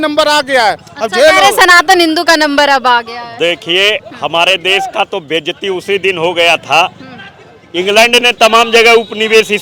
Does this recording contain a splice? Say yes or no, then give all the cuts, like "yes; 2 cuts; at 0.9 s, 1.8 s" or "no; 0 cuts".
no; 0 cuts